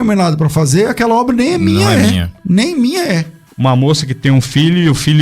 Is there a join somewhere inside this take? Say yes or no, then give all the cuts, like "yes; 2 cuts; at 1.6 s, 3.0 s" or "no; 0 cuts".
yes; 1 cut; at 3.4 s